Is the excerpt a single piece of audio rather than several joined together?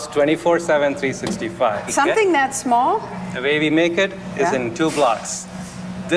yes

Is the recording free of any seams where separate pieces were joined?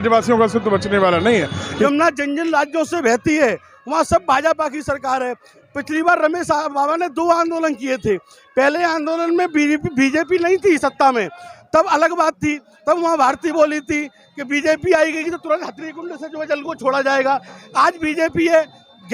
no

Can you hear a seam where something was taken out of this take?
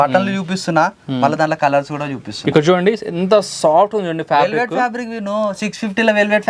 no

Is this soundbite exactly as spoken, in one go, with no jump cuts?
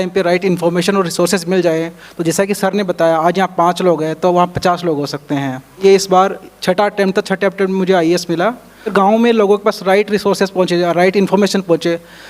no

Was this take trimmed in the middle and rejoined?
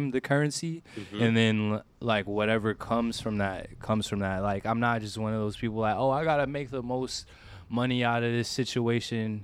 no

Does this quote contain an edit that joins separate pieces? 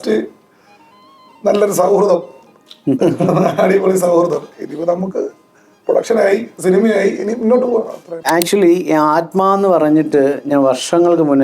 yes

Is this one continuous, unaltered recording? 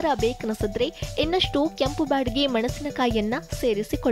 yes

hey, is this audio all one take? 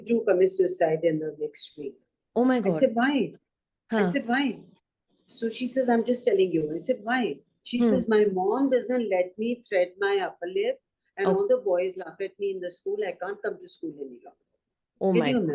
yes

